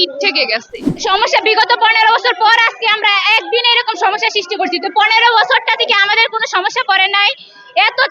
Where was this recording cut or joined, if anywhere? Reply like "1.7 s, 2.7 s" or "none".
1.0 s